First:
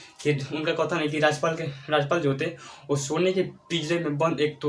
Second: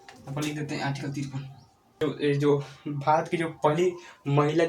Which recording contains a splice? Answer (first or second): second